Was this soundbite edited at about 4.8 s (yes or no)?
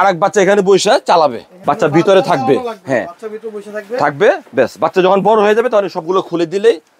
no